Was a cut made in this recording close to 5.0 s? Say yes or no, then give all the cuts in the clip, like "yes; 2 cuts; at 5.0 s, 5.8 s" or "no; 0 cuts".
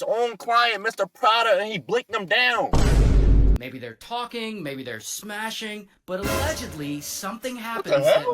no; 1 cut; at 3.6 s